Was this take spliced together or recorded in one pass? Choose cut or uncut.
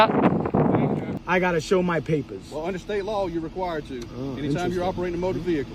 cut